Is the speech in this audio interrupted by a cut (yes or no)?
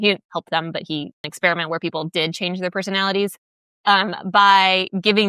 yes